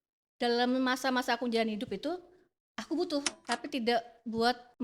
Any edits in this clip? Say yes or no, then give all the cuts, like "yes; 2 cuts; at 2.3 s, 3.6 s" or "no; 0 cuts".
yes; 1 cut; at 3.4 s